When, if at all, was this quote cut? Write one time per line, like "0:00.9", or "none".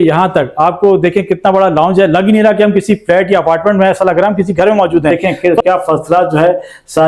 0:05.2